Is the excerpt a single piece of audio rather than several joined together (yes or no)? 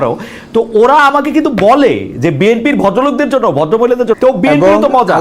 no